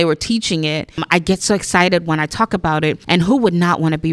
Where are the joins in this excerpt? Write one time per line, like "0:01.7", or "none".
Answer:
0:01.0
0:03.0